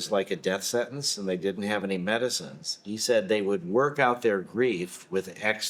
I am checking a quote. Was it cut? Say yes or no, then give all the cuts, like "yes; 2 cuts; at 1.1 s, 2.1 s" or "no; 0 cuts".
no; 0 cuts